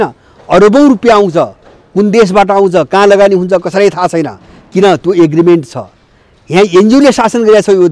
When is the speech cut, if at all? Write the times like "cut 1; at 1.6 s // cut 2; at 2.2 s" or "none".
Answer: none